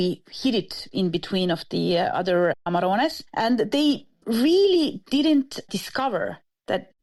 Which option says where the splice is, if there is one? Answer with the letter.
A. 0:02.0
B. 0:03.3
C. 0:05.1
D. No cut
D